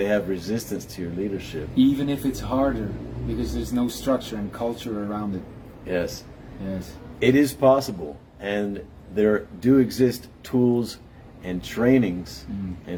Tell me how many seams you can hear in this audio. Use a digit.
0